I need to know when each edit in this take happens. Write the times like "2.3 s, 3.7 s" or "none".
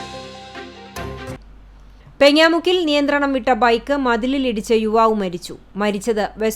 1.3 s